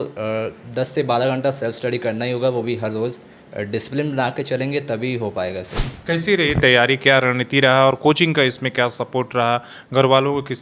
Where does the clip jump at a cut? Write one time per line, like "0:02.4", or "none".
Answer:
0:05.8